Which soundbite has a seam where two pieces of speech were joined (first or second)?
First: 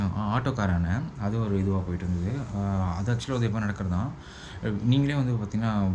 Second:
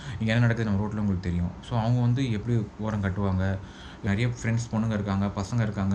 second